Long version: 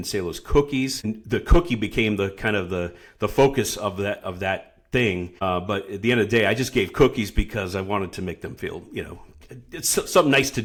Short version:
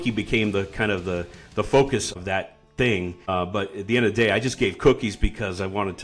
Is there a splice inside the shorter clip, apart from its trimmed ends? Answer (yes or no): yes